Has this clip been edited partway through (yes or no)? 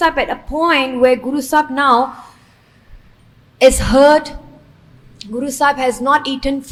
no